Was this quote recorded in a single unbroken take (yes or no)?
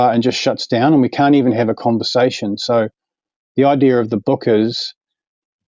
yes